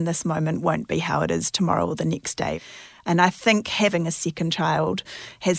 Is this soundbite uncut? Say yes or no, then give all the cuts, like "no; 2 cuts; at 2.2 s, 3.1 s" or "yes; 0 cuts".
no; 2 cuts; at 2.6 s, 3.9 s